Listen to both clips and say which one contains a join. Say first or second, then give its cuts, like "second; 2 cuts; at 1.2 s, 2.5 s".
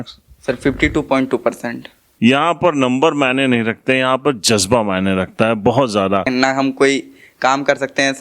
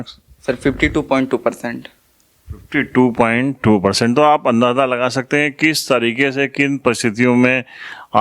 first; 2 cuts; at 2.0 s, 6.3 s